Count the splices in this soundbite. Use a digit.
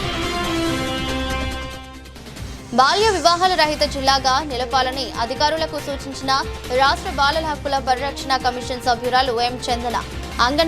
1